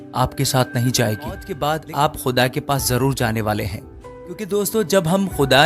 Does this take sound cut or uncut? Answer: cut